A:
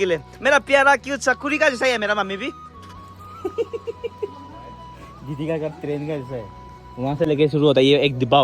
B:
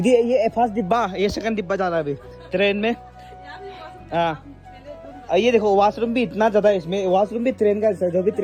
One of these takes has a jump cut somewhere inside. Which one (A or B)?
A